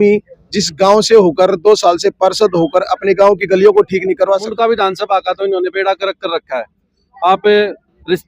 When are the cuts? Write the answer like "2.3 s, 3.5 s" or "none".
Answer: 4.5 s